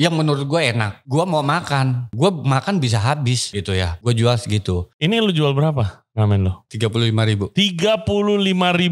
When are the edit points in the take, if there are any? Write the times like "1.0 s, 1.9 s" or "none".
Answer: 0.9 s, 2.1 s, 3.7 s, 4.9 s, 6.6 s